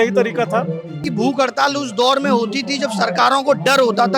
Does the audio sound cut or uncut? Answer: cut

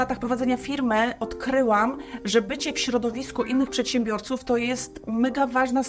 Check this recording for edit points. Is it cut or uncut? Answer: uncut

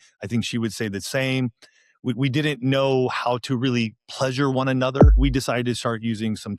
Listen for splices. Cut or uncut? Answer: cut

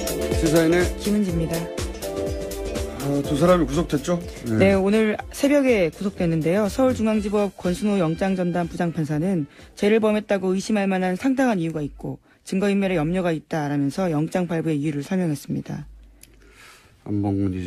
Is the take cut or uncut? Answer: uncut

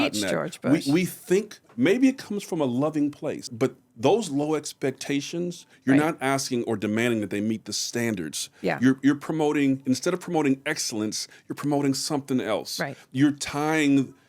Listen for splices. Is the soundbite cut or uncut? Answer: cut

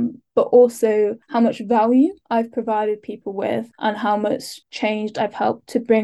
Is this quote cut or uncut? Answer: cut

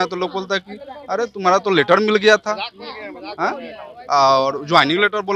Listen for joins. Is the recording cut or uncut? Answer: uncut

